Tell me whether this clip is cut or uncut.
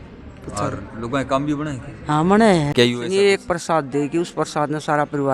cut